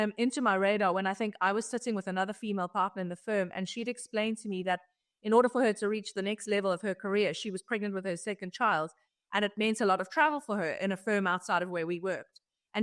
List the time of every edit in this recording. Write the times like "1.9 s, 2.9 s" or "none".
none